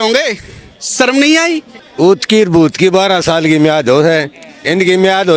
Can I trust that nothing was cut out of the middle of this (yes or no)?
no